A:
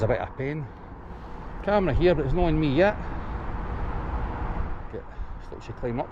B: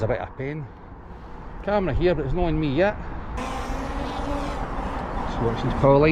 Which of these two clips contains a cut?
B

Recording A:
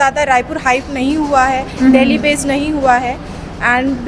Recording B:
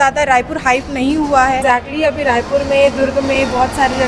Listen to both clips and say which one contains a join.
B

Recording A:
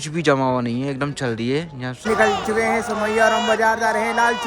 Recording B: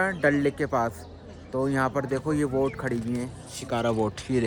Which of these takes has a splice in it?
A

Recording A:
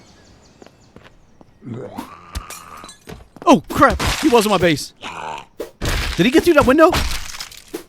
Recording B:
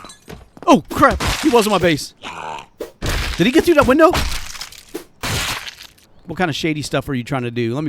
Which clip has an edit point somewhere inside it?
B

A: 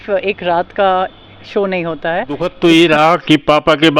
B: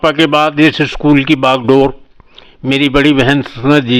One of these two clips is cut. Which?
A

